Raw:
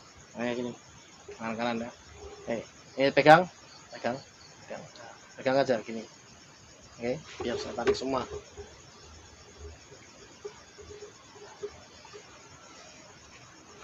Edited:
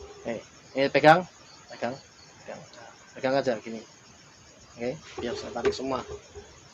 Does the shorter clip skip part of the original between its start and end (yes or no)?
no